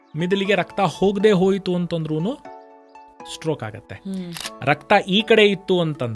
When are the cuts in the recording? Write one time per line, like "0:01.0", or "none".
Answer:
0:04.4